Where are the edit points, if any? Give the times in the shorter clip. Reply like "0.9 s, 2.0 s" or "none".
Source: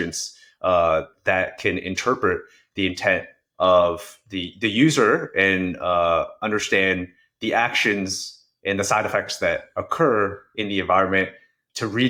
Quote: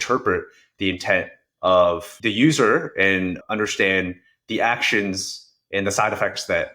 2.1 s, 3.4 s